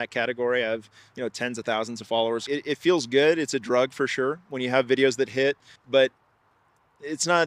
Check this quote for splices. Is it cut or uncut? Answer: cut